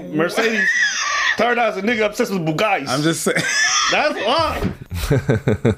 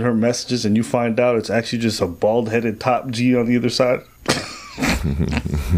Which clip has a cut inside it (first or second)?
first